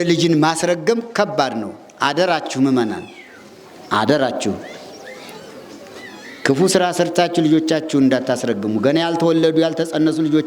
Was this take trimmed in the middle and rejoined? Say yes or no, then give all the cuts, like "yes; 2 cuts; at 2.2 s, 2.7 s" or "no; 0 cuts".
no; 0 cuts